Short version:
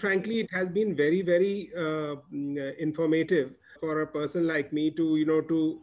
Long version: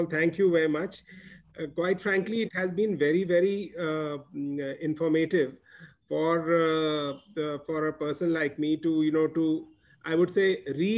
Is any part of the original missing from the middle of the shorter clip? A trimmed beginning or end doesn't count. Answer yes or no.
yes